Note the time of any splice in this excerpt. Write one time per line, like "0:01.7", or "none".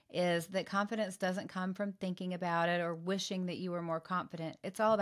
none